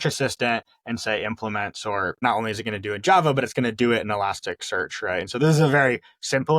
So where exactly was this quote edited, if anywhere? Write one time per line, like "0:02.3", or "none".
0:02.2

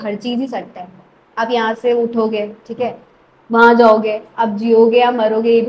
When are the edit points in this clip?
none

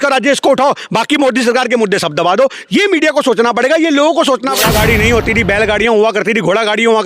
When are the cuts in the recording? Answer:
0:04.6

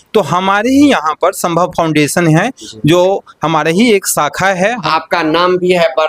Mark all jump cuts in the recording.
0:04.9

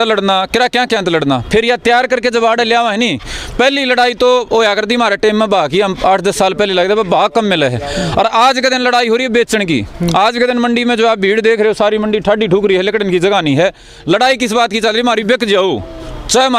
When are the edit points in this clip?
none

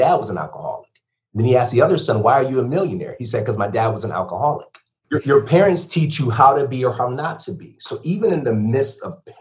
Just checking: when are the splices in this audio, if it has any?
0:05.0

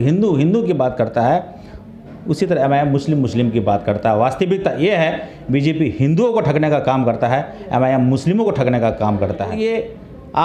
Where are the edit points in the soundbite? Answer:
0:09.6

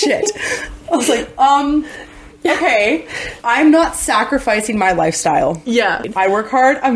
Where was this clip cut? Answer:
0:06.1

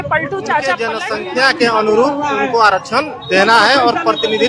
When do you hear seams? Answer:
0:00.9

